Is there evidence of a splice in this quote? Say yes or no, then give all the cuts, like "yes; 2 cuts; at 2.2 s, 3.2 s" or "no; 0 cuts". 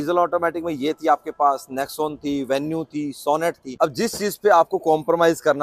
yes; 1 cut; at 3.7 s